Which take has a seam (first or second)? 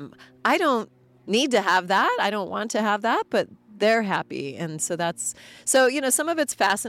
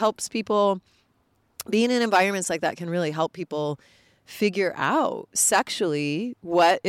second